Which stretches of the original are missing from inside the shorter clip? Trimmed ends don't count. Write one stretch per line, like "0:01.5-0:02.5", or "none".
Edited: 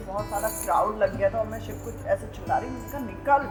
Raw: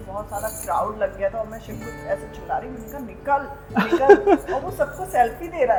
none